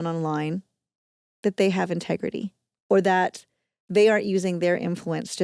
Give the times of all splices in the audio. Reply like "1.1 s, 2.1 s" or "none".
none